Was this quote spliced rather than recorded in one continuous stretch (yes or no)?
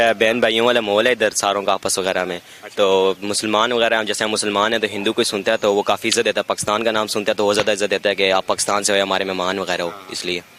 no